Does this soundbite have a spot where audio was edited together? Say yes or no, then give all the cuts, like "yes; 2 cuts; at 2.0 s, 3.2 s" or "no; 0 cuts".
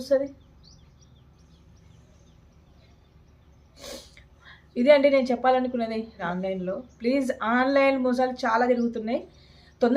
yes; 1 cut; at 6.1 s